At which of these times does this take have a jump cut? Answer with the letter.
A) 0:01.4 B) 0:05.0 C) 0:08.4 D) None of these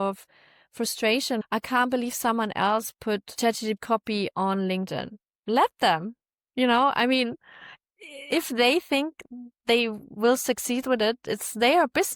A